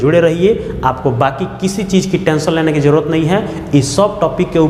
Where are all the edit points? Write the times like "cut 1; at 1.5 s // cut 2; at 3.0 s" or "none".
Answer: none